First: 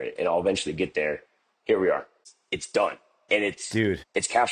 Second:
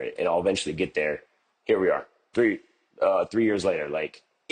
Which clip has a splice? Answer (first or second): first